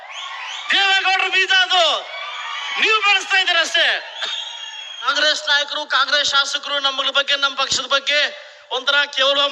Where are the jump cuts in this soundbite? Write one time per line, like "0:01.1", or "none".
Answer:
0:05.1